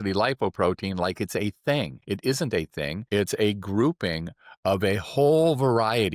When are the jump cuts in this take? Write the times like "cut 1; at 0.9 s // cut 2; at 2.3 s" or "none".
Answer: cut 1; at 2.0 s // cut 2; at 3.0 s